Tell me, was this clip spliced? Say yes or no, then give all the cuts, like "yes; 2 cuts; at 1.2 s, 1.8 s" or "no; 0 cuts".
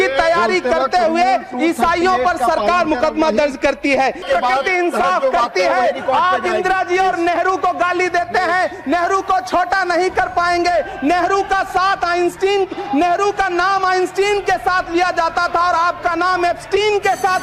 yes; 1 cut; at 4.2 s